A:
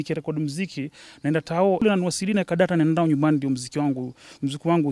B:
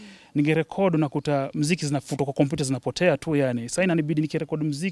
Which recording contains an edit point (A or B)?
A